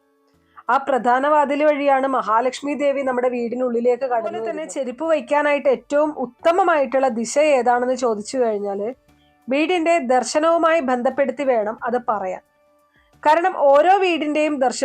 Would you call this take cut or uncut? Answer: cut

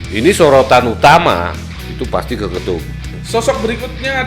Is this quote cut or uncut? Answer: cut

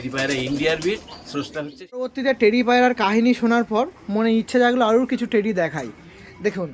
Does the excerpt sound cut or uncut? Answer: cut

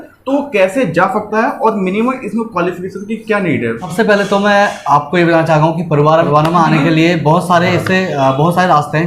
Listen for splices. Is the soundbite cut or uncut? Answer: cut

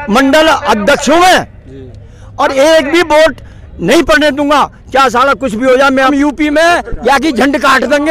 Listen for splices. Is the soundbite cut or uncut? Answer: cut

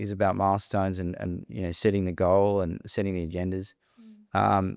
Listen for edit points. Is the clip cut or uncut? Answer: uncut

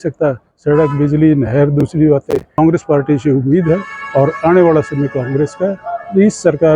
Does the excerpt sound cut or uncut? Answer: cut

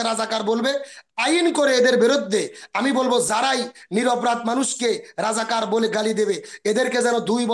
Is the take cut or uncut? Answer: uncut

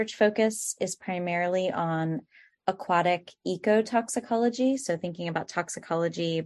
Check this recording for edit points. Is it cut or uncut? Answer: uncut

